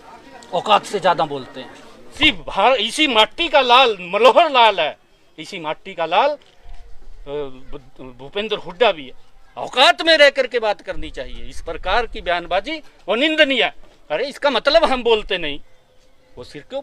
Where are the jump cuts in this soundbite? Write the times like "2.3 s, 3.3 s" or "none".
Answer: 2.1 s